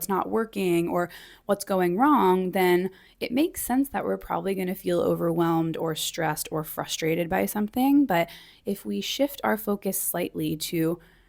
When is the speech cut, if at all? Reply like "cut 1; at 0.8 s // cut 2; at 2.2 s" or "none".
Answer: none